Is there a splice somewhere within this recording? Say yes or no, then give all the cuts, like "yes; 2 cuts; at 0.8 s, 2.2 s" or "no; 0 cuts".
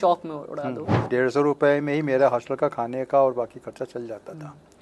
yes; 1 cut; at 1.1 s